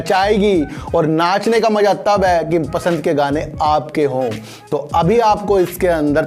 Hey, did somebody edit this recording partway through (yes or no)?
no